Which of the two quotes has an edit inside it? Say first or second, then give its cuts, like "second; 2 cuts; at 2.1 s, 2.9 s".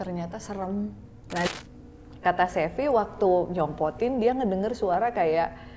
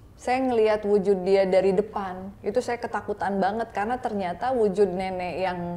first; 1 cut; at 1.5 s